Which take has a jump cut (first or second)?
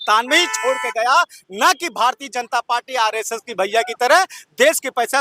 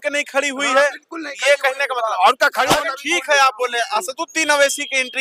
second